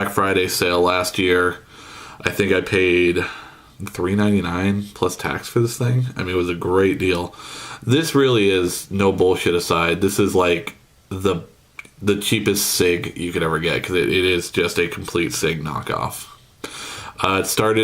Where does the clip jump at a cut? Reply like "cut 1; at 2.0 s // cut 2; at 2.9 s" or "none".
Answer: cut 1; at 16.3 s